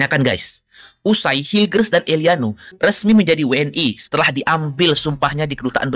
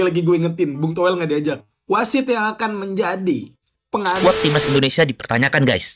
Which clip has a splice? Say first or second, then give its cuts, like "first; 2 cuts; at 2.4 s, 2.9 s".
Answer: second; 1 cut; at 4.2 s